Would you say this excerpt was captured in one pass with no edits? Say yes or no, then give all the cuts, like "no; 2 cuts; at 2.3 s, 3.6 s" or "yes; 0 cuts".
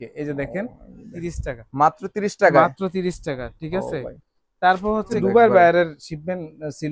no; 2 cuts; at 1.1 s, 5.1 s